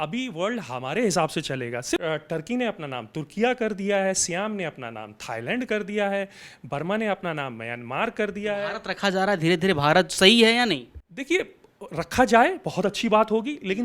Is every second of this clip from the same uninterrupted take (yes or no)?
yes